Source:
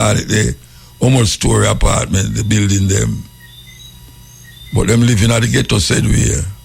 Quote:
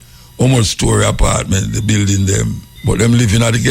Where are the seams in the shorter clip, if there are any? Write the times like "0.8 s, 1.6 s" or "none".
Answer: 2.7 s